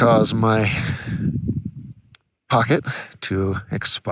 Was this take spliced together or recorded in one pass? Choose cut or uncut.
uncut